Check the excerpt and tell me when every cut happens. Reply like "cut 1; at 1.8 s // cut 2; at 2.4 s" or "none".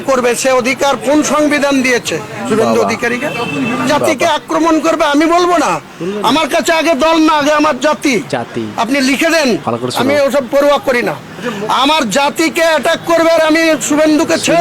cut 1; at 3.9 s